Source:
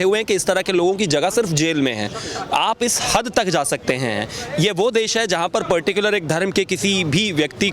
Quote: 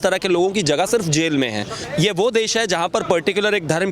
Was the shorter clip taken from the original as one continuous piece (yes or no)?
no